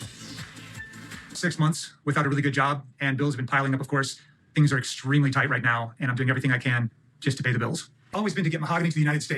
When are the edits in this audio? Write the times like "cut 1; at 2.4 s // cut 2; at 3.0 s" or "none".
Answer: cut 1; at 5.9 s